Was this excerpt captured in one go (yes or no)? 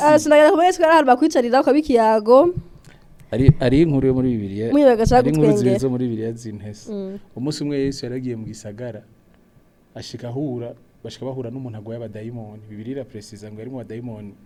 yes